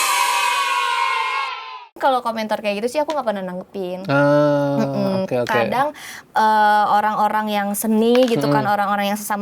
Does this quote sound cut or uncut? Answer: cut